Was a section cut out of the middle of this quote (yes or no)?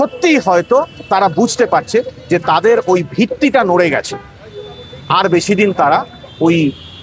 no